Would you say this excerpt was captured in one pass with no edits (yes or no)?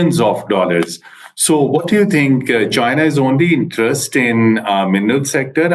yes